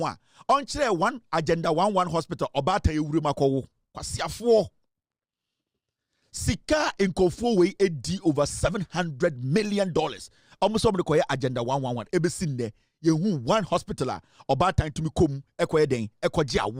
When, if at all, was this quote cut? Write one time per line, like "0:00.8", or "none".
none